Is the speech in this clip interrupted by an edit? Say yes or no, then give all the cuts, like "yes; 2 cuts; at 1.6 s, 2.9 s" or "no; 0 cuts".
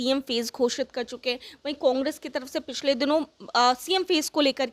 no; 0 cuts